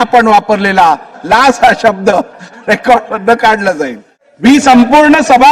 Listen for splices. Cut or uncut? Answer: uncut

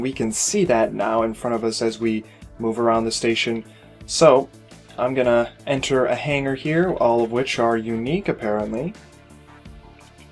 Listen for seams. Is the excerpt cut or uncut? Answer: cut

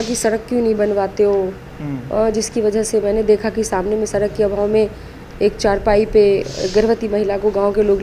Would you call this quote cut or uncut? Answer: uncut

